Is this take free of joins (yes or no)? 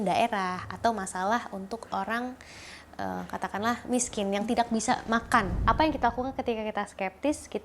no